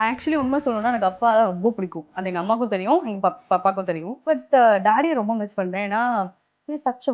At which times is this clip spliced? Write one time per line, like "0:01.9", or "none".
0:04.1